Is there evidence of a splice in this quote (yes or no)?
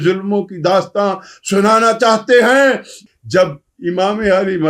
yes